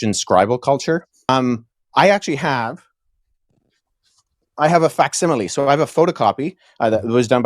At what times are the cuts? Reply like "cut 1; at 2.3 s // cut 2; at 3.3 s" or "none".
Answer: cut 1; at 1.3 s